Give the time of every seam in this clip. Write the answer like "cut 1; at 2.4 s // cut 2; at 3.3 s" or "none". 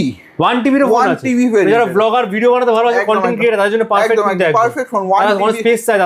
none